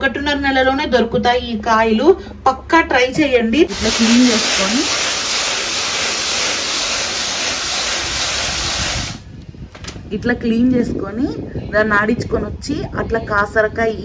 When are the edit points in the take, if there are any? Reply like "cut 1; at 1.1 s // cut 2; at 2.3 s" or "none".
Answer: cut 1; at 3.7 s